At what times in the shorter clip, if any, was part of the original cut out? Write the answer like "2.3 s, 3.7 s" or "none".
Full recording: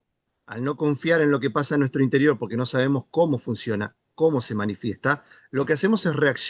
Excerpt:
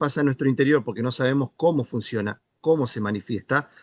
none